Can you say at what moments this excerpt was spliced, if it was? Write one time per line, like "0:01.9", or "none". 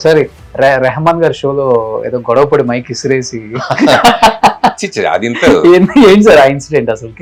none